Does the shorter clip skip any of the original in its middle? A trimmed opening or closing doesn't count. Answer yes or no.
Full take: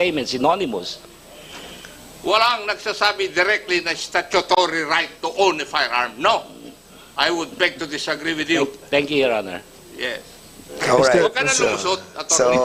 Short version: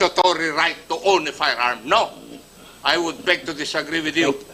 no